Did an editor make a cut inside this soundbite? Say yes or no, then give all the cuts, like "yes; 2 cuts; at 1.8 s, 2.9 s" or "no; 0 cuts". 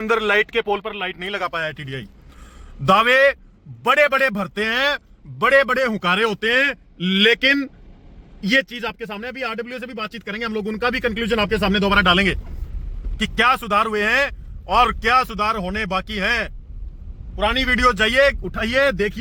no; 0 cuts